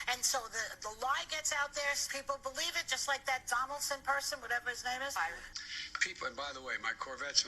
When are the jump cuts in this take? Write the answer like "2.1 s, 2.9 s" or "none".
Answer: 5.5 s